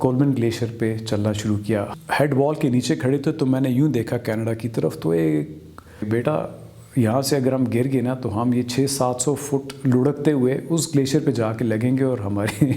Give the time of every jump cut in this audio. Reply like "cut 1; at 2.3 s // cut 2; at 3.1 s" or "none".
cut 1; at 1.9 s // cut 2; at 6.0 s

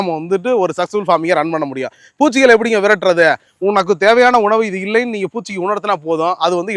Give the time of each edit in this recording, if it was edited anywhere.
none

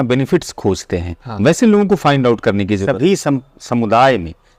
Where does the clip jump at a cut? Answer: cut 1; at 2.8 s

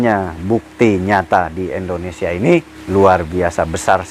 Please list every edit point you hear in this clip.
cut 1; at 2.8 s

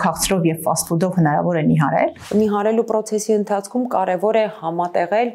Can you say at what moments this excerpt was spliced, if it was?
cut 1; at 2.2 s

